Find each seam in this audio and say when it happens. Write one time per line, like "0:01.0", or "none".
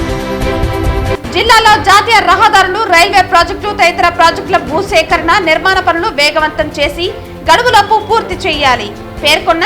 0:01.1